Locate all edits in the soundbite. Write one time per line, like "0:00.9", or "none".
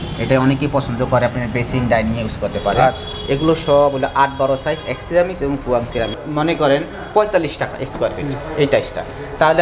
0:06.2